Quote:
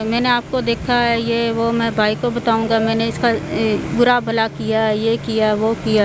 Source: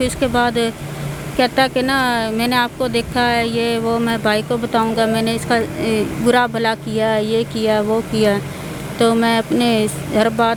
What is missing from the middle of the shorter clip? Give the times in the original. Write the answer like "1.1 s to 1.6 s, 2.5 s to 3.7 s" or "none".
none